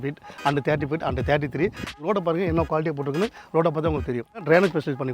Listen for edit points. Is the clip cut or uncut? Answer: cut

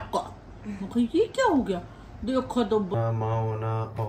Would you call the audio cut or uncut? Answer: cut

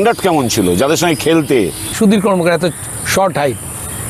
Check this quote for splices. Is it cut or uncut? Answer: cut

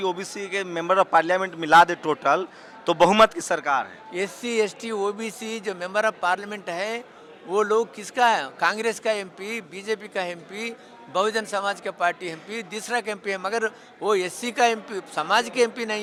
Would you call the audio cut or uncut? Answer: uncut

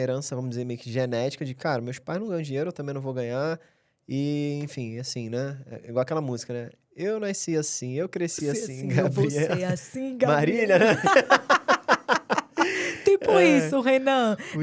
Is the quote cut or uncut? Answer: uncut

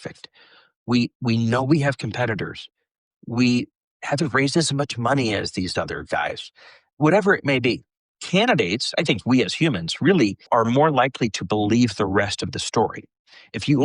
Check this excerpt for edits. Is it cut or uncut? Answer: cut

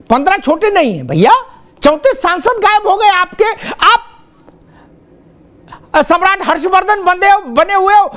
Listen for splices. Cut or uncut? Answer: uncut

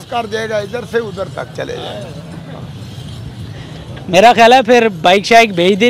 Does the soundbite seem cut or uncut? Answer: uncut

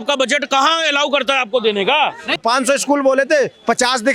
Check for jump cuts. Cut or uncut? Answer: cut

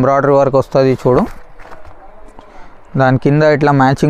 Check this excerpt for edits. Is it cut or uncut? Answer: uncut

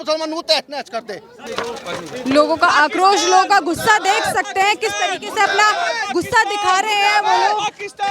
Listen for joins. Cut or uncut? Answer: cut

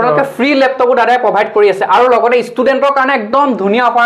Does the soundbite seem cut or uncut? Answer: uncut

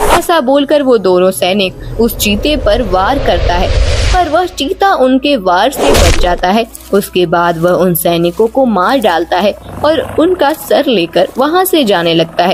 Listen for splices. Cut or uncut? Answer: uncut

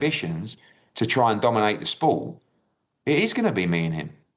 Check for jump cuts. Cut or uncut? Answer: uncut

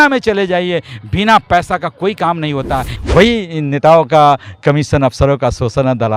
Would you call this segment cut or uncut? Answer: cut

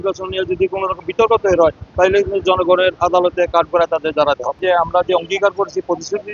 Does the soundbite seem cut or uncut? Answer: cut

